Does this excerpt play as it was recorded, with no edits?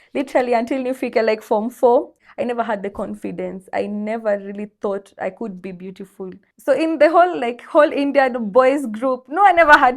no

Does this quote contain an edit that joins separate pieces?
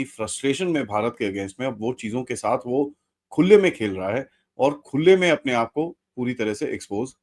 no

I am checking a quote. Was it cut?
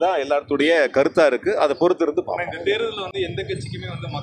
no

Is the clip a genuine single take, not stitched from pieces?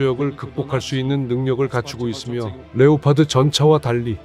no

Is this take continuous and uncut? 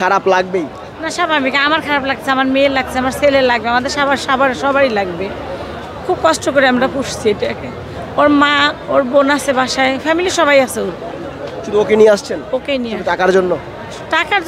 yes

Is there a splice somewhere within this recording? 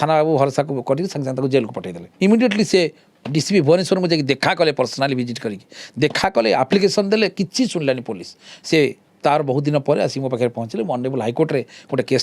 yes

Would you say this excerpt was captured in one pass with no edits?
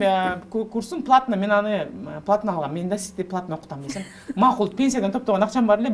yes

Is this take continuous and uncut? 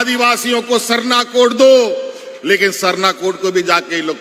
yes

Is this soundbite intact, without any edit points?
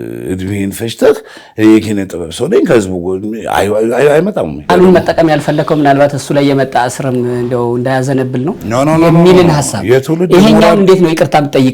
no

